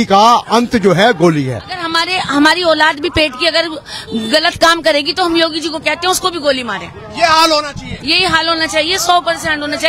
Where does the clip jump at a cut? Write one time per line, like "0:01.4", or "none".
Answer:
0:01.9